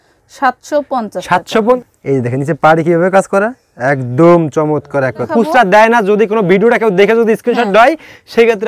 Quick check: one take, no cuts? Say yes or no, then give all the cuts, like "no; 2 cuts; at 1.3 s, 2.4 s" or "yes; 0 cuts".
no; 2 cuts; at 1.8 s, 5.3 s